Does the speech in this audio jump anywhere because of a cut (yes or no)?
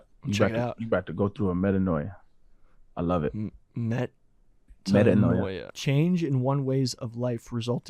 yes